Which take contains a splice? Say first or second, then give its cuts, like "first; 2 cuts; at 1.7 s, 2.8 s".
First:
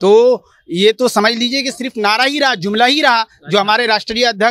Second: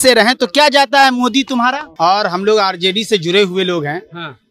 second; 1 cut; at 1.9 s